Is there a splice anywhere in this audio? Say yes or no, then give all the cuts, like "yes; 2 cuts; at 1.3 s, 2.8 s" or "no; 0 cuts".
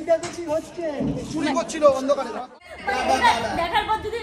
yes; 1 cut; at 2.4 s